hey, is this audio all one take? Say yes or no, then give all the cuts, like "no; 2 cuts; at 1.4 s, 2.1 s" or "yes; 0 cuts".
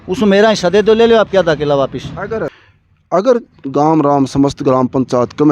yes; 0 cuts